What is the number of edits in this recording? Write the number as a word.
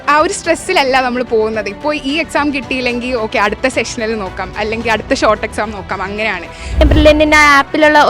one